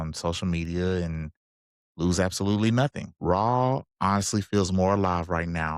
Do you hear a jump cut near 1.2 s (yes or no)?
no